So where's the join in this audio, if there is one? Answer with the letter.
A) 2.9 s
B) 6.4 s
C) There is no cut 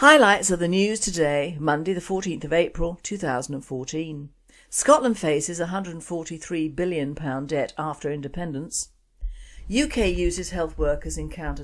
B